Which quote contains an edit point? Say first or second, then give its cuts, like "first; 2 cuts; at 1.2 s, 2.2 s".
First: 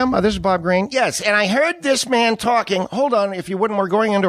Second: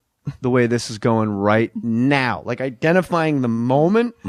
first; 1 cut; at 3.3 s